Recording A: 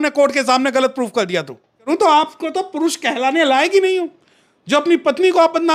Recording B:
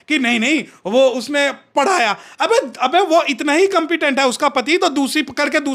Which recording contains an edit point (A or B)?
A